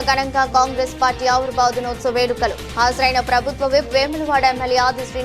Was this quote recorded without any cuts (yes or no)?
yes